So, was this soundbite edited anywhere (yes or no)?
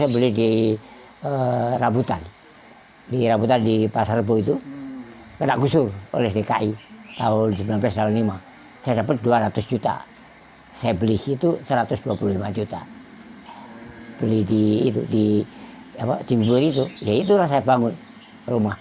no